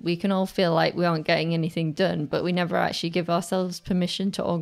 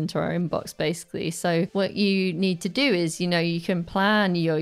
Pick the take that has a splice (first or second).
second